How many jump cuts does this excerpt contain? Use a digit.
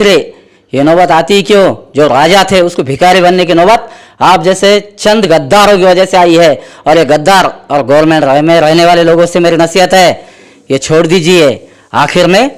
0